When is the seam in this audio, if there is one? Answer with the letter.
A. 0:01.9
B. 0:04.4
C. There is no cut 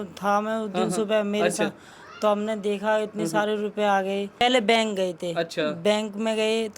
B